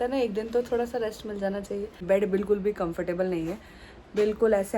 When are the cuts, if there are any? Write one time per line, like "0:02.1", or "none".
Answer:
0:02.0